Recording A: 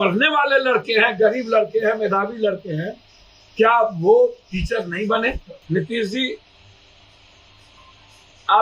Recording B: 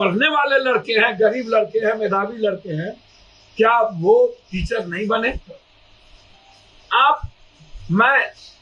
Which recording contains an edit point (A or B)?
A